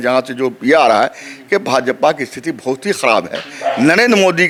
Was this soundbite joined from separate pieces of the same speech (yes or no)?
no